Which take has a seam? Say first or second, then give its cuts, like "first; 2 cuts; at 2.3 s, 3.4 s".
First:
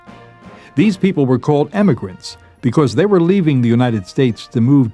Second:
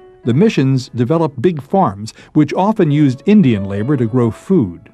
second; 1 cut; at 2.1 s